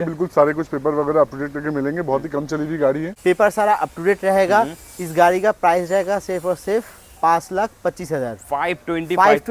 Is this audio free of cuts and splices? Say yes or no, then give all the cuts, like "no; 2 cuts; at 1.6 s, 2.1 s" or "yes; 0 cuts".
no; 1 cut; at 3.1 s